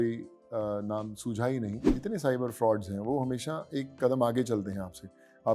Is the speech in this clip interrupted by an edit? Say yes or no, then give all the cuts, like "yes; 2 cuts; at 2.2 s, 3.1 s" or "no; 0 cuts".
yes; 1 cut; at 1.9 s